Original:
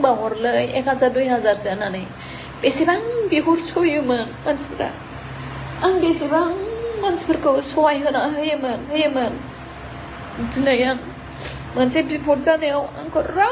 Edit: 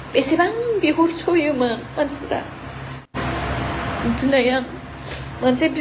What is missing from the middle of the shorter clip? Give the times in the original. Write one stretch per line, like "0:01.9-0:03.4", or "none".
0:05.6-0:09.5